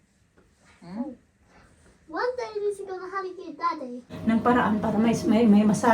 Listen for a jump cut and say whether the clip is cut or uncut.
cut